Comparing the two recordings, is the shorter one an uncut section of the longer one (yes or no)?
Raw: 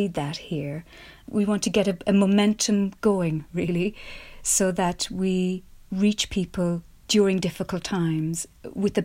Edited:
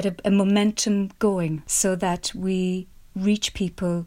no